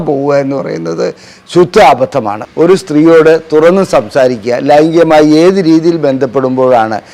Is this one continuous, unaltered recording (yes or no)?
no